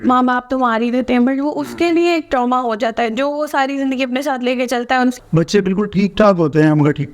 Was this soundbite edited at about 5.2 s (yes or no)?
yes